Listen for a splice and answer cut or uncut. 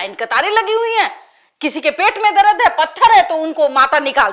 uncut